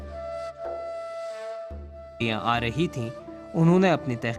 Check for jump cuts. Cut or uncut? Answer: uncut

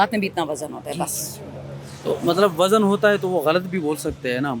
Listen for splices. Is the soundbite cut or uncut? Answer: uncut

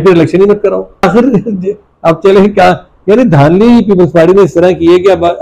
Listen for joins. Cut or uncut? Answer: cut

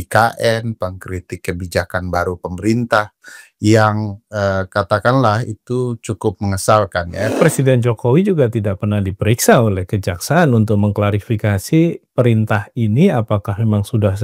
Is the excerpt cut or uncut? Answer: cut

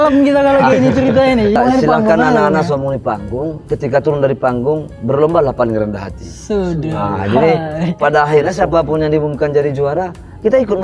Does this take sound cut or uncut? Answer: cut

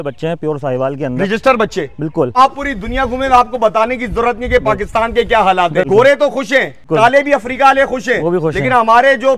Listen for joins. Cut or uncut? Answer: cut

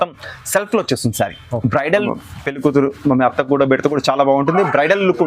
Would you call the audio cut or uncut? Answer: cut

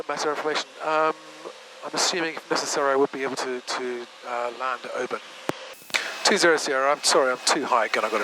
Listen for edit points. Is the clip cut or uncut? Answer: cut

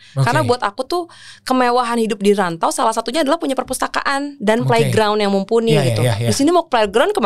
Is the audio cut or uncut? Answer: uncut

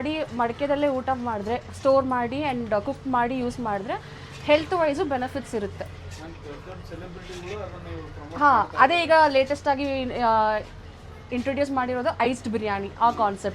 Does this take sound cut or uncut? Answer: uncut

